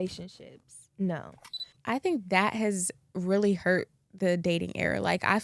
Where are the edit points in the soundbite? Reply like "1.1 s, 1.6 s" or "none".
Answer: 1.7 s